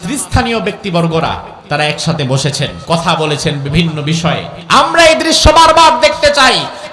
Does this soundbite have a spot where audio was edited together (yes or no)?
yes